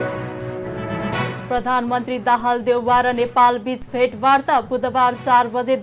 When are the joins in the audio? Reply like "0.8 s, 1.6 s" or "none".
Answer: none